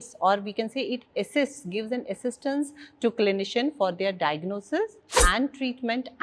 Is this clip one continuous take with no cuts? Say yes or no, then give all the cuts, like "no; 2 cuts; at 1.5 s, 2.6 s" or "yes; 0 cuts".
yes; 0 cuts